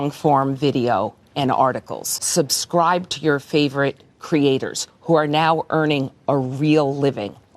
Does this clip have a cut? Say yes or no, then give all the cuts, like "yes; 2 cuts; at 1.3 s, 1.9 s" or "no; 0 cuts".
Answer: no; 0 cuts